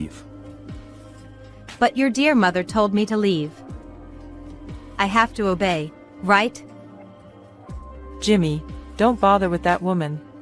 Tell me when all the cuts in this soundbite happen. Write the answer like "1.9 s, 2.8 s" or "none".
none

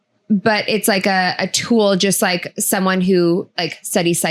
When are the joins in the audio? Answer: none

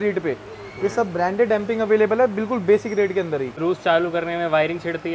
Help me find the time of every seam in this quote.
3.5 s

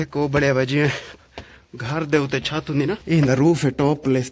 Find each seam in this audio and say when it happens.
none

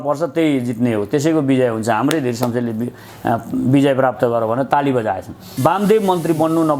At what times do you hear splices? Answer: 5.4 s

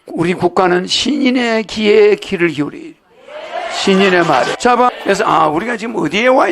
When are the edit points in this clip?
4.7 s

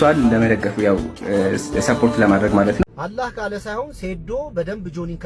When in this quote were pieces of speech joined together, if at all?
2.8 s

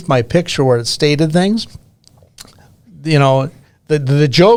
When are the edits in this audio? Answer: none

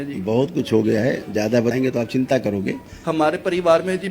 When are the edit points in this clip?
1.7 s

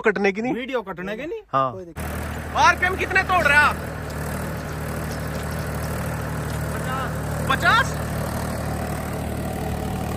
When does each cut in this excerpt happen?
2.0 s

